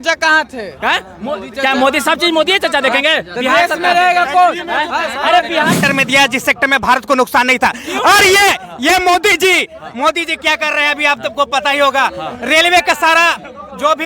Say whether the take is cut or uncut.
cut